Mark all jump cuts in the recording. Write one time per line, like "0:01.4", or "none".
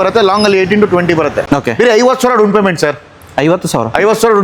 0:01.4